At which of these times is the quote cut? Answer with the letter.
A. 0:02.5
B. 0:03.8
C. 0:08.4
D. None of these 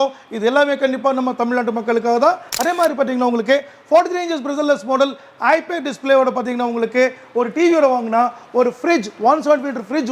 A